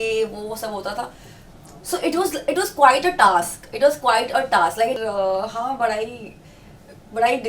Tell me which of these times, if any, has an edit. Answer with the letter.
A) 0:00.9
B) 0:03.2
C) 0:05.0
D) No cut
C